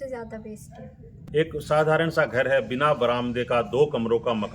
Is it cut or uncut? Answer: cut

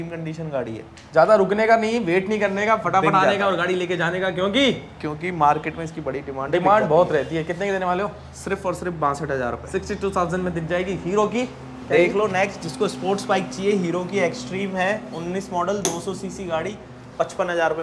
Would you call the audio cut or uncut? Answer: uncut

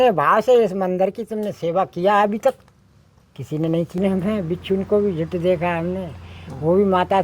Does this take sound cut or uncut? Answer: cut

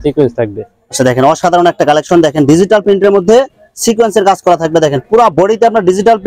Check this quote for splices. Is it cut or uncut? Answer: uncut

